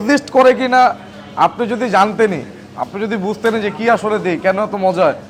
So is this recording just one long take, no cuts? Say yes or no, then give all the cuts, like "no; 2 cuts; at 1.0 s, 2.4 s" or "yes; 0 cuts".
yes; 0 cuts